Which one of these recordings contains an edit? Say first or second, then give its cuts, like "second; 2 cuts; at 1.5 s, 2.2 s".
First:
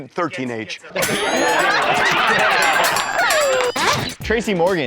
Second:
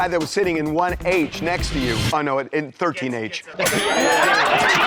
first; 1 cut; at 3.7 s